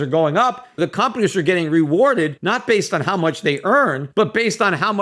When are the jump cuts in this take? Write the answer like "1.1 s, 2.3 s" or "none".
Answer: 0.8 s, 2.4 s, 4.0 s